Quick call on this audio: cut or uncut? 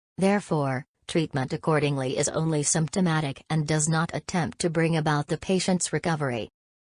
cut